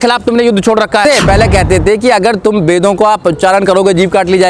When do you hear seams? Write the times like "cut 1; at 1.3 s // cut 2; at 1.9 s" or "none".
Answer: cut 1; at 1.0 s